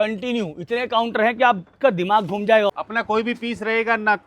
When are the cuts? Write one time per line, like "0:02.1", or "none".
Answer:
0:02.7